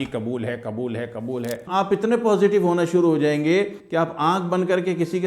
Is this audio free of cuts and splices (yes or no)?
no